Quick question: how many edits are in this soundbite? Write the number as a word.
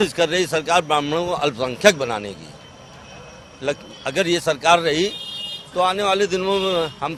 zero